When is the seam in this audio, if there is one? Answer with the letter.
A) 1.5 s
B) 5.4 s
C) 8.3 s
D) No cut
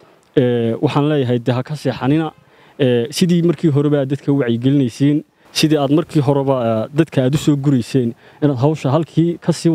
B